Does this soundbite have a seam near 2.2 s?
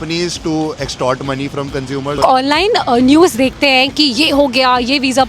yes; 1 cut; at 2.2 s

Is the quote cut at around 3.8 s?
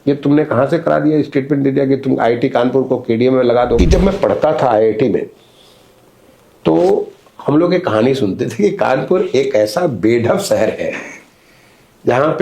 yes; 1 cut; at 3.8 s

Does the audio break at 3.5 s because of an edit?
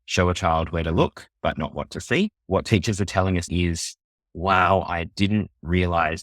yes; 2 cuts; at 2.4 s, 3.5 s

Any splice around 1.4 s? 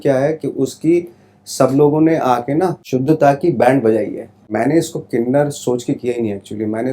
no; 2 cuts; at 2.8 s, 4.5 s

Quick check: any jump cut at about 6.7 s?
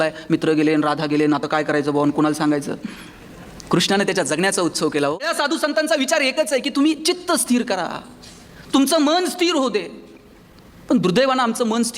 no; 1 cut; at 5.3 s

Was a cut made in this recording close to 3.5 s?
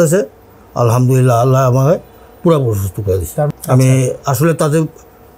yes; 1 cut; at 3.5 s

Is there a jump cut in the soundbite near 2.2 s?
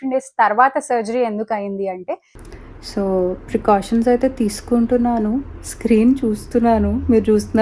yes; 1 cut; at 2.2 s

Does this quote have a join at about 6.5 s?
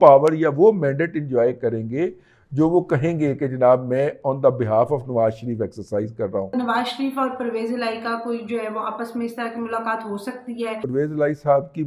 yes; 2 cuts; at 6.5 s, 10.8 s

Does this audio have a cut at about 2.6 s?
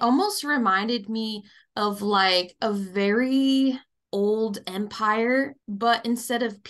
no; 2 cuts; at 3.9 s, 5.6 s

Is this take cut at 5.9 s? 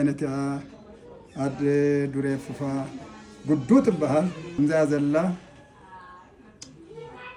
no; 1 cut; at 4.4 s

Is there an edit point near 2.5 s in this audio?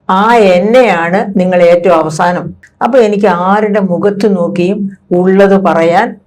yes; 1 cut; at 2.5 s

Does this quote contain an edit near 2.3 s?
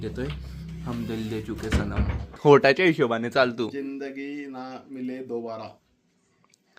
yes; 1 cut; at 2.3 s

